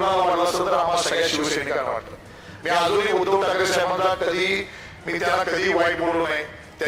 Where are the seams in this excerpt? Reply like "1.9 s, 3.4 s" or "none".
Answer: none